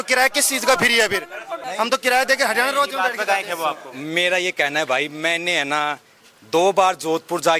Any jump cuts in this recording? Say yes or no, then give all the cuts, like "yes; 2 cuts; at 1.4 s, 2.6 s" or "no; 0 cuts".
no; 0 cuts